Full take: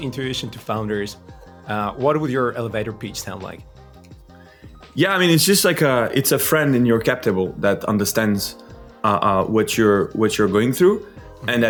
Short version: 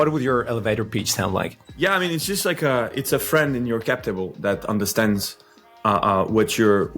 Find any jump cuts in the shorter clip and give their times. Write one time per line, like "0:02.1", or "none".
0:01.6